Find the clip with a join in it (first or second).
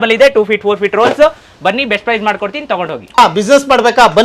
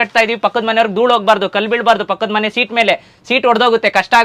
first